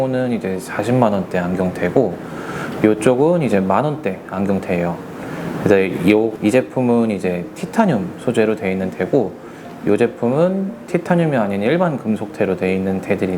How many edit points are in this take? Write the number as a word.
one